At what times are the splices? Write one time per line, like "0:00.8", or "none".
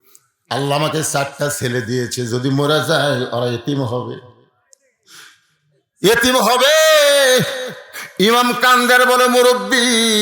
none